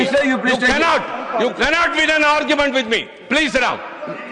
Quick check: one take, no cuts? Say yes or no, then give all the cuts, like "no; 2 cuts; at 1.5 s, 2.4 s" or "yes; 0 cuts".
yes; 0 cuts